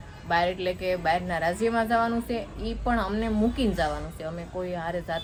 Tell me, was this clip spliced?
no; 0 cuts

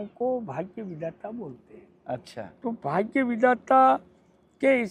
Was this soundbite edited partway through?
no; 0 cuts

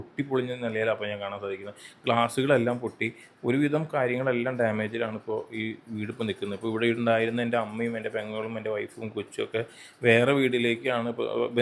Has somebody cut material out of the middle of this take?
no; 0 cuts

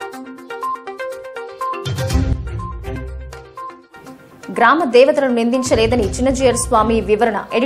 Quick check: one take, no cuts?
no; 2 cuts; at 2.4 s, 3.9 s

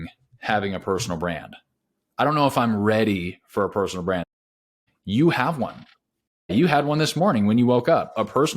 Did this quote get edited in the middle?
yes; 2 cuts; at 4.6 s, 6.5 s

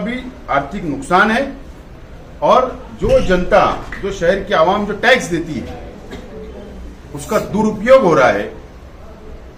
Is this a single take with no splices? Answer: yes; 0 cuts

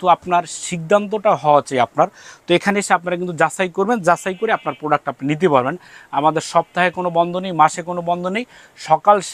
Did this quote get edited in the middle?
no; 0 cuts

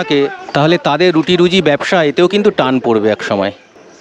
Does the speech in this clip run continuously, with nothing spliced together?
yes; 0 cuts

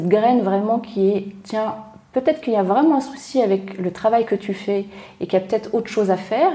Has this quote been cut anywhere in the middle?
no; 0 cuts

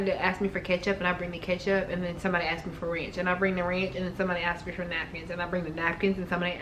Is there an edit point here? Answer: no; 0 cuts

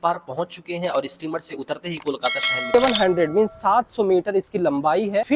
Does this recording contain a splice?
yes; 1 cut; at 2.7 s

